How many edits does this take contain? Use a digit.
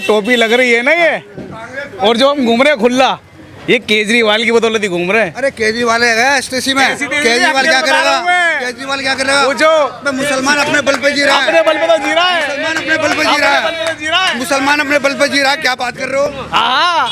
0